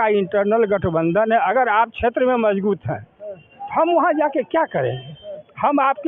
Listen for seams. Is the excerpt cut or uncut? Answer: uncut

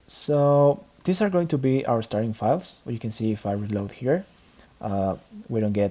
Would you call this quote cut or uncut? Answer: cut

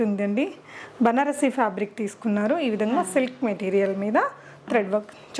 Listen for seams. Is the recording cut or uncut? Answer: uncut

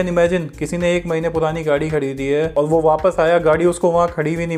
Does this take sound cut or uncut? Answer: uncut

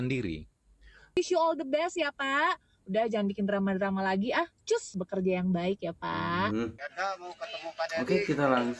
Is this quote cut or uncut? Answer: cut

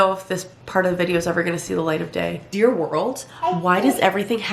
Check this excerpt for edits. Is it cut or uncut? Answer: cut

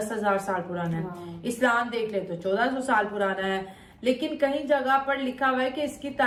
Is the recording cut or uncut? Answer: uncut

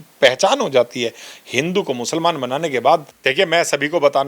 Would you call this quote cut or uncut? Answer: cut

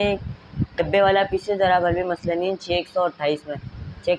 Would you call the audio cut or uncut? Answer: uncut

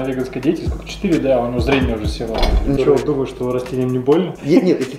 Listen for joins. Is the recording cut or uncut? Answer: cut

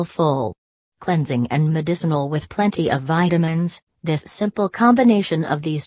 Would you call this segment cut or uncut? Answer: cut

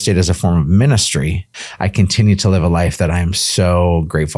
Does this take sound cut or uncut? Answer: cut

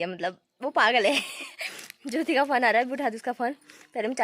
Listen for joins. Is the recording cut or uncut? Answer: uncut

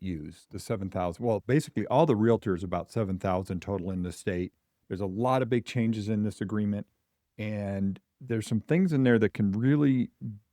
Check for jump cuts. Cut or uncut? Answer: cut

